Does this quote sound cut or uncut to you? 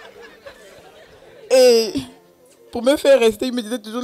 cut